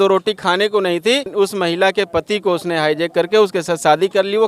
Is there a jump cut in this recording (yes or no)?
yes